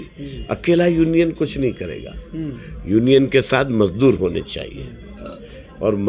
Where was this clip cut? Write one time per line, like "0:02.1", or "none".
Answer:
none

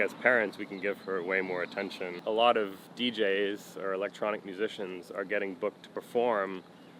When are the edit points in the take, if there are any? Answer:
0:02.1

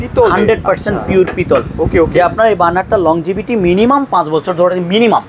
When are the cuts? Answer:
none

